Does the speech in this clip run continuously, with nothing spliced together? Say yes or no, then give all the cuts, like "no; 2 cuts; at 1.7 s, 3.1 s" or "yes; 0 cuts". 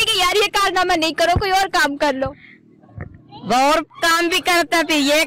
yes; 0 cuts